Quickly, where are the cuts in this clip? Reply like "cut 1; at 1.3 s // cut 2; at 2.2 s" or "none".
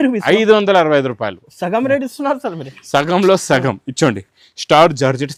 none